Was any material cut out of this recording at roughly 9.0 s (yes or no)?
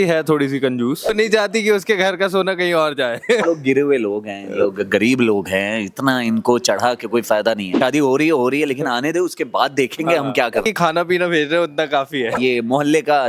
no